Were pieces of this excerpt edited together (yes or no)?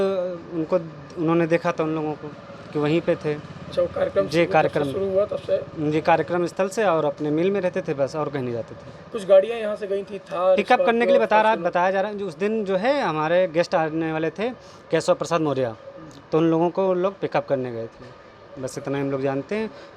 no